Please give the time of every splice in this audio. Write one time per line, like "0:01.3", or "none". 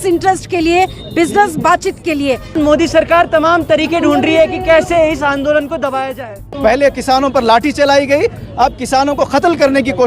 0:02.6
0:06.4